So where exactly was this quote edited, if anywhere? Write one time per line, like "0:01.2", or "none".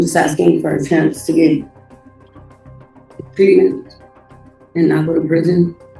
none